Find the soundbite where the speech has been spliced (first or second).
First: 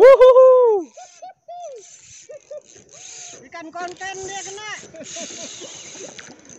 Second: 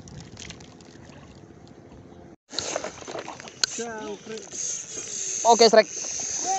second